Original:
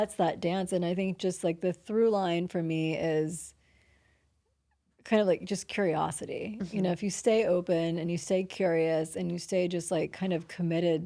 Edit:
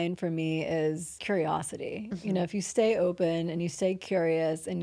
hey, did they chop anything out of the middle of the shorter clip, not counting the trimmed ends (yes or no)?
yes